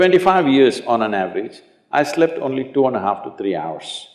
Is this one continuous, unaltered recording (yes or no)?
yes